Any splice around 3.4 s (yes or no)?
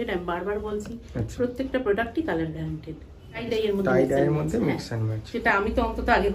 yes